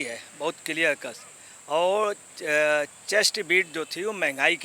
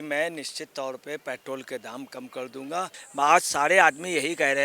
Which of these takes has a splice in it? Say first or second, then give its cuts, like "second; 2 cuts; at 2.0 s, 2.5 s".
second; 1 cut; at 3.0 s